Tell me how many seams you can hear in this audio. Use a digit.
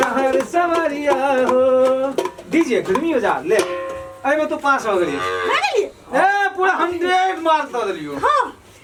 0